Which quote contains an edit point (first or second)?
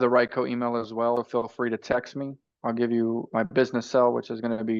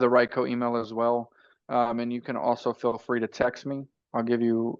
first